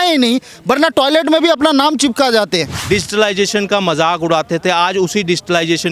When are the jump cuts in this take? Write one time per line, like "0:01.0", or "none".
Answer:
0:02.7